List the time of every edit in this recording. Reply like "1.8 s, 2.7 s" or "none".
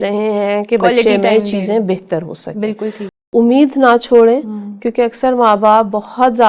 3.3 s